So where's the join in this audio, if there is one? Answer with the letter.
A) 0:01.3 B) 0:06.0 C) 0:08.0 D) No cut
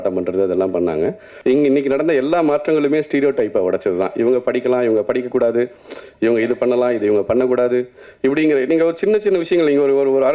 A